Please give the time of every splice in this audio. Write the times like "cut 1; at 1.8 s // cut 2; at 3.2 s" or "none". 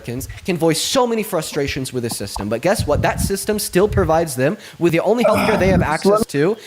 cut 1; at 4.9 s